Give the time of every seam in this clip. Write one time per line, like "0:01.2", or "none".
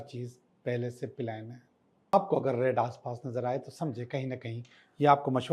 0:02.1

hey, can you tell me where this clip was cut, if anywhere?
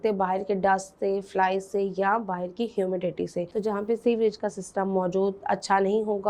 0:03.5

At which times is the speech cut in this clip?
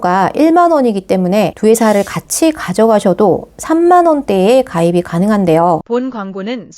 0:05.8

